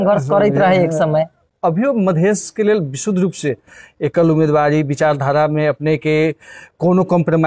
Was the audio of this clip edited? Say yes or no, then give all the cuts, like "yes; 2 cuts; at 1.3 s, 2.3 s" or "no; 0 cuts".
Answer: no; 0 cuts